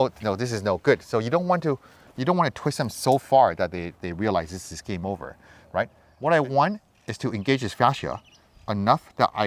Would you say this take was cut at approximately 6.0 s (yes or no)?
yes